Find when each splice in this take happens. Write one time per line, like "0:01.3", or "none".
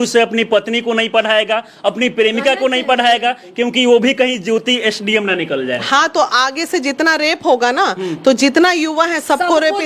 none